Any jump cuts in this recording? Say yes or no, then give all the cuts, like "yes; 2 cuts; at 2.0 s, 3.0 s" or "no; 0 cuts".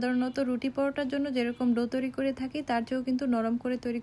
no; 0 cuts